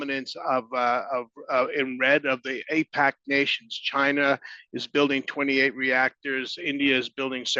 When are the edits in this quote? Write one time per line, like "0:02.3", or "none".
none